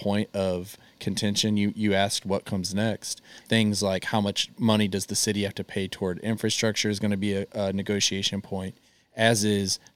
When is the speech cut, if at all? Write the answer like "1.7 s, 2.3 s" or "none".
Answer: 3.4 s

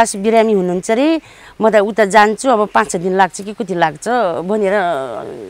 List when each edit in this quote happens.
none

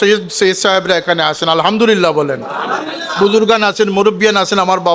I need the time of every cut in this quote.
none

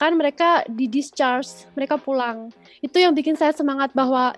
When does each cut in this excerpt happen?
none

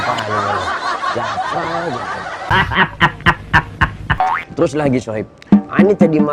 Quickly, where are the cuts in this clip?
none

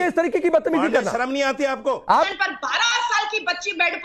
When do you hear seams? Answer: 2.3 s

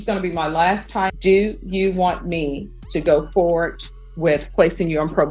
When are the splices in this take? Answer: 1.2 s

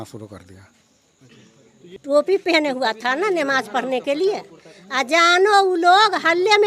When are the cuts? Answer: 1.9 s

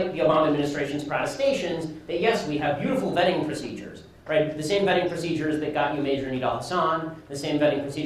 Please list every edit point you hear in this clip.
2.6 s

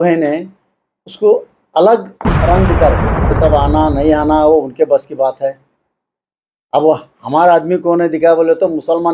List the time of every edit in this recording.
3.3 s

